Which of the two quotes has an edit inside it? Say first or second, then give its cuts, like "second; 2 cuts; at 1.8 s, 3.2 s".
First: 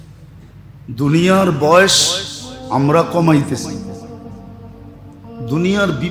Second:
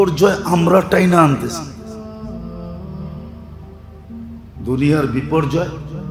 second; 2 cuts; at 1.7 s, 4.5 s